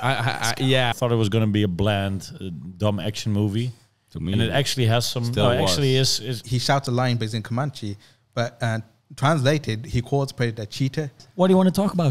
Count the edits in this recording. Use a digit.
3